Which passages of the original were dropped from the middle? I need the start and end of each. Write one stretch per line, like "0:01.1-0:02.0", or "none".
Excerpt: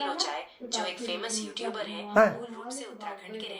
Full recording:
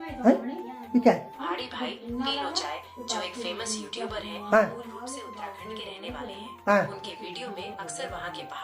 none